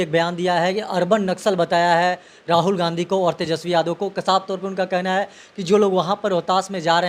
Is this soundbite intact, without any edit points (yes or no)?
yes